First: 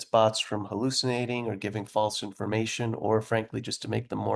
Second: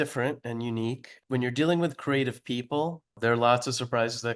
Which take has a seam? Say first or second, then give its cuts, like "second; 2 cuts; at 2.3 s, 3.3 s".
second; 2 cuts; at 1.1 s, 3.1 s